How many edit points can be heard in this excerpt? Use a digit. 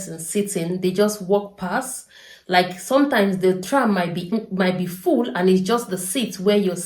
1